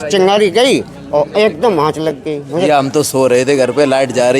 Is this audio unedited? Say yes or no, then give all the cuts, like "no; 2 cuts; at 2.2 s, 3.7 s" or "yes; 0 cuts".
no; 1 cut; at 2.7 s